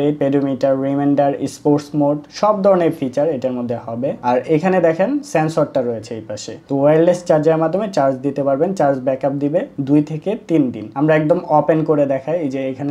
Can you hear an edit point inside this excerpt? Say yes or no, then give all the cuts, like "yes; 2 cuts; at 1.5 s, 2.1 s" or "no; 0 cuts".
no; 0 cuts